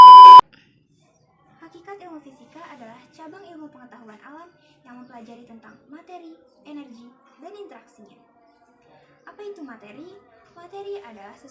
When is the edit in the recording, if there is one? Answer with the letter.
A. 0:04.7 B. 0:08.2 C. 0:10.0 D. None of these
D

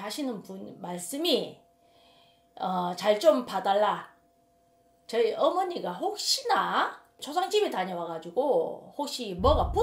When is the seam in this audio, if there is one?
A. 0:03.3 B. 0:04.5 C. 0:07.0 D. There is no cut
D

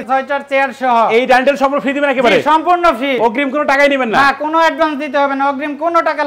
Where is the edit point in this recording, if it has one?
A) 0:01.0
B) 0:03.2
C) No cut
B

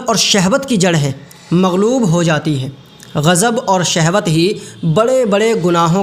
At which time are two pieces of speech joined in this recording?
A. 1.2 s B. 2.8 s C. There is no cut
C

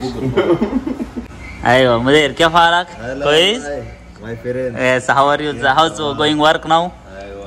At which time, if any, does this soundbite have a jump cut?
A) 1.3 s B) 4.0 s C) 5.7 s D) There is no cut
A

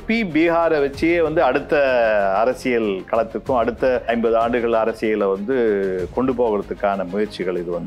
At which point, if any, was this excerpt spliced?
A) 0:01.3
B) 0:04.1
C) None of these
B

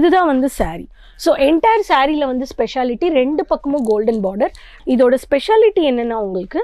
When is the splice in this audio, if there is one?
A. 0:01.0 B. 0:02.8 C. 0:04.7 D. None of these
C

